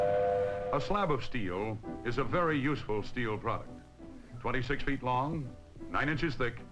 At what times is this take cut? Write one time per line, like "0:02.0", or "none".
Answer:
none